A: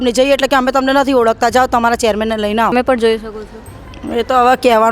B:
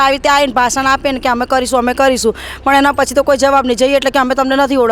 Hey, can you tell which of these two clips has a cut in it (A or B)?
A